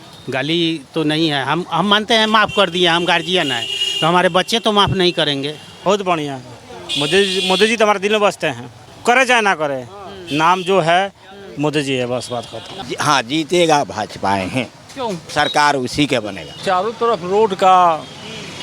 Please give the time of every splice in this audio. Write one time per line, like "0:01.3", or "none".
0:05.9
0:08.9
0:12.8
0:16.6